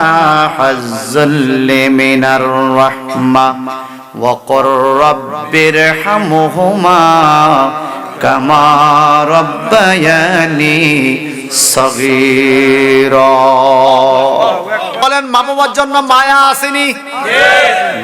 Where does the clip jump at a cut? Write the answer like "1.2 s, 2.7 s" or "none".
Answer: 14.9 s